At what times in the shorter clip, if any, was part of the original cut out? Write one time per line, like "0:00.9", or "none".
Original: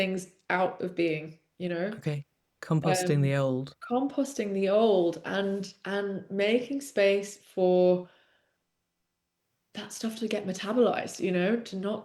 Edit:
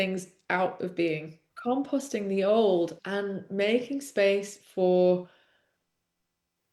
0:01.5
0:03.0